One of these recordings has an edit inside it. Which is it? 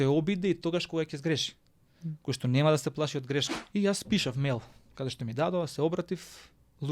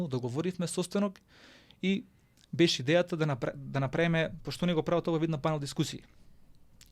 first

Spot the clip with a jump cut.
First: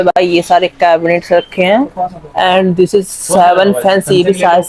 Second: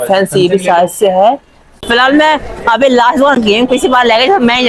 second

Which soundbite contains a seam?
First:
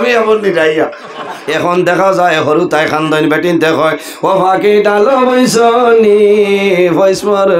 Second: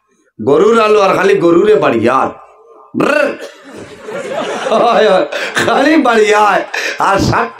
first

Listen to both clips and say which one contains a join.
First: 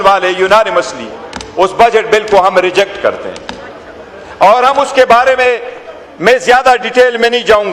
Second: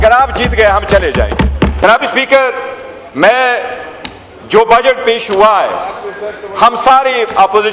second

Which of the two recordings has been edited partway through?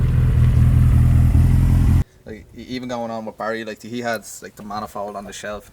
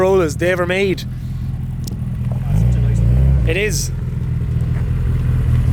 first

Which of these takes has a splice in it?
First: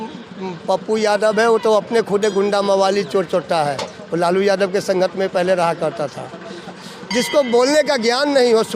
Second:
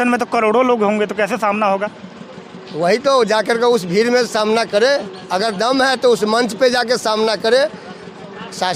first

